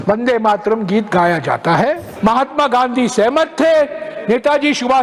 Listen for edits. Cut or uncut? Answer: cut